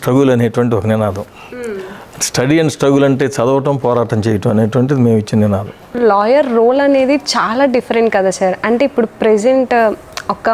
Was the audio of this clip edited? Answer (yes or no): yes